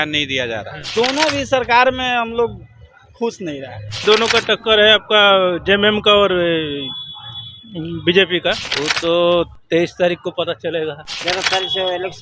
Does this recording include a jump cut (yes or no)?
yes